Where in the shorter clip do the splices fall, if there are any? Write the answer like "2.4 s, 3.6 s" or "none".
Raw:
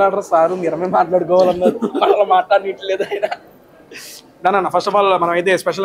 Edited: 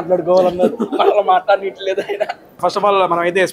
2.6 s